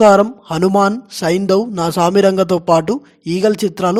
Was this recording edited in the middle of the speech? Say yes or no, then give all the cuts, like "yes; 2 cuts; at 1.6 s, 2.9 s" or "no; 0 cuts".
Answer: no; 0 cuts